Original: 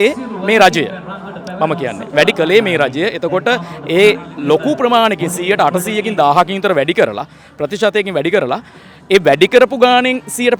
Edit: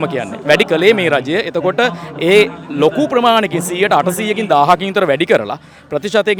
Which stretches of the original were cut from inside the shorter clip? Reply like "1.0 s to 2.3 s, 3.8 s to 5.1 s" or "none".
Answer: none